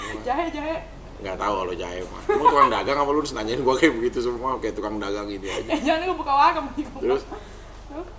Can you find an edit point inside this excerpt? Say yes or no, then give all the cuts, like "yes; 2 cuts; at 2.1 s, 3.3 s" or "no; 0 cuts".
no; 0 cuts